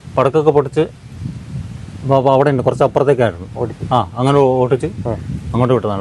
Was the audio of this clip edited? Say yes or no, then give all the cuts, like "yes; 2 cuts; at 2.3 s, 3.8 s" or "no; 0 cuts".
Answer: no; 0 cuts